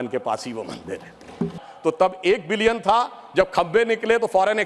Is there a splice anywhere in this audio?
yes; 1 cut; at 1.6 s

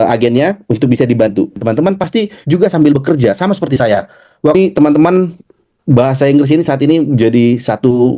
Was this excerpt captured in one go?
no; 2 cuts; at 1.6 s, 4.5 s

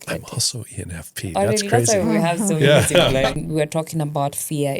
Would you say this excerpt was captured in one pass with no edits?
no; 1 cut; at 3.3 s

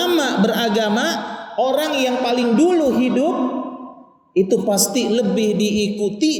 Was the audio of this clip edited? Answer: no; 0 cuts

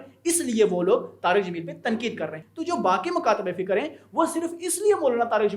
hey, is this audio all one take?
no; 1 cut; at 2.5 s

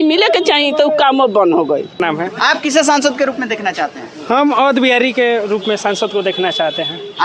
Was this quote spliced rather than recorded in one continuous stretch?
yes; 1 cut; at 2.0 s

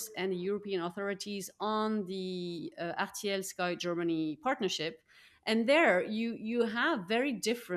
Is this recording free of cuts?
yes; 0 cuts

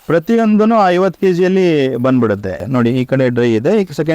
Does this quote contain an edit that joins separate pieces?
yes; 1 cut; at 2.6 s

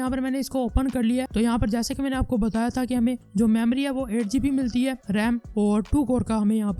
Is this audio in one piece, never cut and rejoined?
yes; 0 cuts

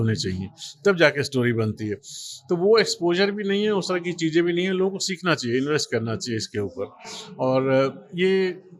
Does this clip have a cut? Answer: no; 0 cuts

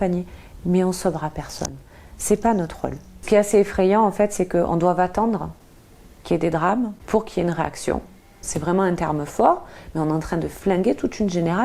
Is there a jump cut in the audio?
yes; 3 cuts; at 3.2 s, 7.0 s, 8.4 s

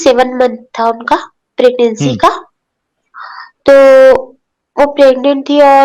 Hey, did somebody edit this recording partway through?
no; 0 cuts

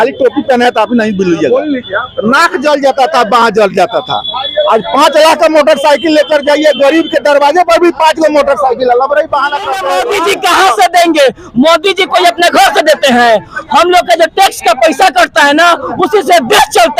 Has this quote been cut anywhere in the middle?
yes; 1 cut; at 9.9 s

